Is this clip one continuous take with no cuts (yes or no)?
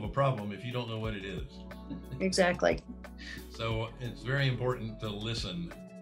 yes